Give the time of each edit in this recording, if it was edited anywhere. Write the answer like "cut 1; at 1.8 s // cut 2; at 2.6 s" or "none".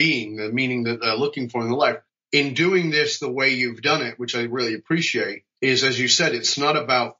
cut 1; at 2.1 s // cut 2; at 5.4 s